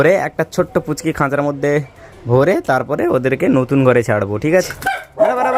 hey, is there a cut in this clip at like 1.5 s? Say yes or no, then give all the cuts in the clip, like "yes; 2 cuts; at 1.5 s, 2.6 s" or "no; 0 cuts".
no; 1 cut; at 4.4 s